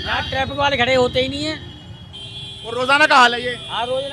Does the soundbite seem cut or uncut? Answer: uncut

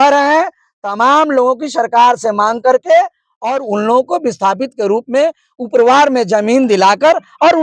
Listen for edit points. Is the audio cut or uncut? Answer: uncut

